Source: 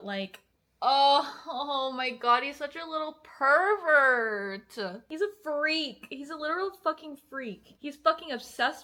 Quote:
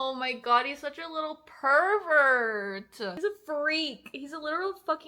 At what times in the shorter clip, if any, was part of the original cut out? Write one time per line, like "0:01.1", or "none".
0:03.1